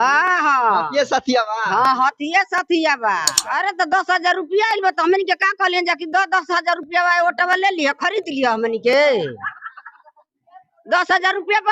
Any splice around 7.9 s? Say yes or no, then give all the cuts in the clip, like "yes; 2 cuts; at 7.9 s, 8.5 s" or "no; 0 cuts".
no; 1 cut; at 3.4 s